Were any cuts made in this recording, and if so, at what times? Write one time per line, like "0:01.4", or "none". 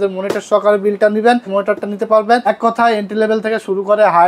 0:01.5
0:02.4